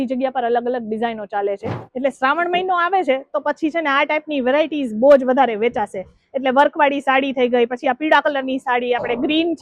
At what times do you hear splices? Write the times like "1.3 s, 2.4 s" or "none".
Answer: 1.8 s